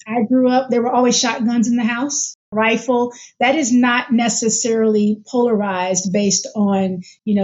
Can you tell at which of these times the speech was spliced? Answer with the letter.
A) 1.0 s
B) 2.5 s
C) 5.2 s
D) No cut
B